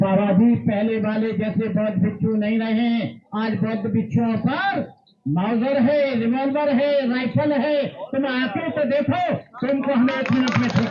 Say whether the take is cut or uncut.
uncut